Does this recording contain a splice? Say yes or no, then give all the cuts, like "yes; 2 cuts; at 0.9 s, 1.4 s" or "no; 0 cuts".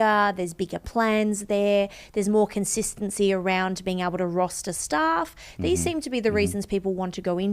no; 0 cuts